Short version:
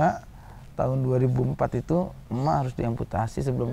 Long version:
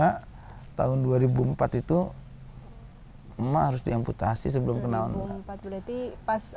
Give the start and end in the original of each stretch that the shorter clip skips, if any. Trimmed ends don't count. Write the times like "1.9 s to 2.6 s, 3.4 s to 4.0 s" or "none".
2.2 s to 3.3 s